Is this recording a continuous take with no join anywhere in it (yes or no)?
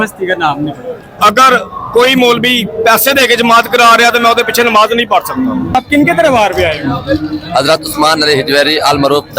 no